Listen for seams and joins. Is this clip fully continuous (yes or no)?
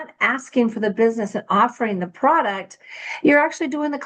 yes